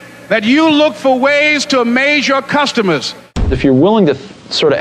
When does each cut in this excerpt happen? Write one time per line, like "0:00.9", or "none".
0:03.6